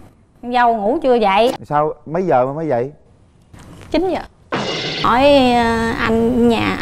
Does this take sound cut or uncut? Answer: cut